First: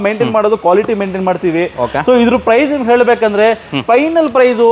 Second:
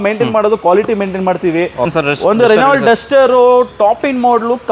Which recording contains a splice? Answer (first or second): second